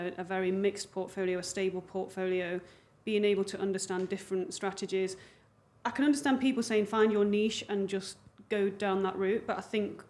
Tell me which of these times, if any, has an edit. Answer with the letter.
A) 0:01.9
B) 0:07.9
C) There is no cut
C